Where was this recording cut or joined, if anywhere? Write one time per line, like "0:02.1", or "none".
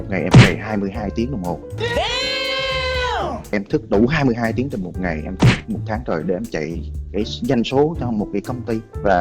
0:03.5